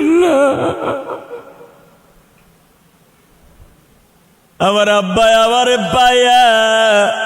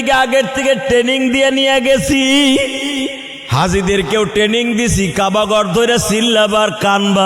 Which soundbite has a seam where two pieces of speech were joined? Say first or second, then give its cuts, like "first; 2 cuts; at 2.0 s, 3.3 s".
first; 1 cut; at 3.9 s